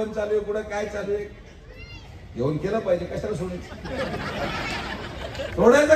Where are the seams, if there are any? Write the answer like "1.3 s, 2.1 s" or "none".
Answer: none